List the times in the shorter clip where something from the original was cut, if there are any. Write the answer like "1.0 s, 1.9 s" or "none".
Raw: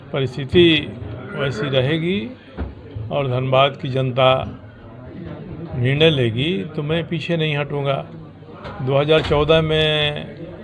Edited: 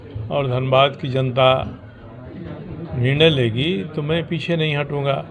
none